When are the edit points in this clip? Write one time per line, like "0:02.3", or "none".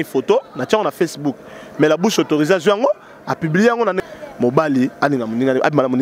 0:04.0